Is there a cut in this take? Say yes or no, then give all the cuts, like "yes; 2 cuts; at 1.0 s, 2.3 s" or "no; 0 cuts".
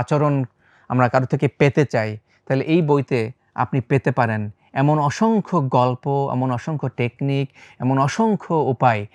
no; 0 cuts